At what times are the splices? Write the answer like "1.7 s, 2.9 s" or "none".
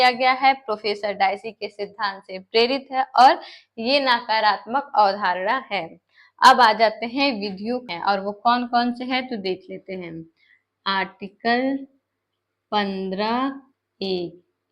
7.8 s